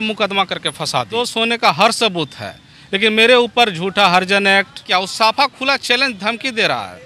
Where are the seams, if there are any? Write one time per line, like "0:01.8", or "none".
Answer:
0:01.1
0:04.8